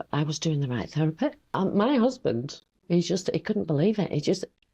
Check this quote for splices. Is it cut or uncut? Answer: cut